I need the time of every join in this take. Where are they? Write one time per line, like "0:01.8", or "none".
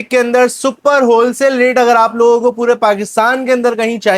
none